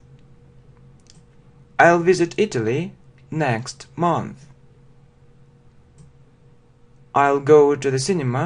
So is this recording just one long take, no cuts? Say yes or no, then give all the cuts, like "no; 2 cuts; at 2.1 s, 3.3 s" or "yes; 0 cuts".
no; 1 cut; at 5.3 s